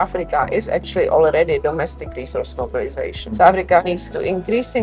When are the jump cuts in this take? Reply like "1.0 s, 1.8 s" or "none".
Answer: none

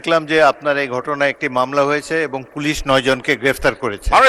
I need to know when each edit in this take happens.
none

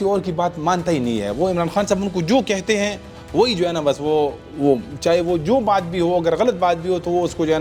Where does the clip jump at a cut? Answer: none

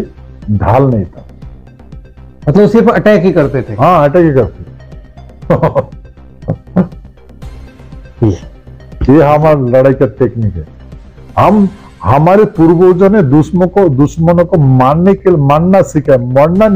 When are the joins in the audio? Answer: none

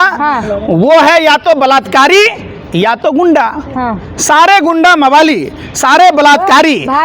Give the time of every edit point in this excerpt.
none

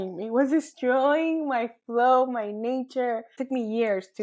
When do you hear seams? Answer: 3.3 s

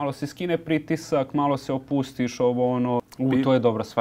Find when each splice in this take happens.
3.1 s

